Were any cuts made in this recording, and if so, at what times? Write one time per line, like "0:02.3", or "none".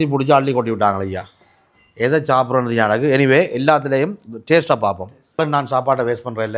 0:05.4